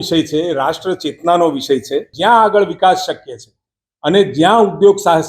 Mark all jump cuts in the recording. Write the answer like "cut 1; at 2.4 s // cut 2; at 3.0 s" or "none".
cut 1; at 2.1 s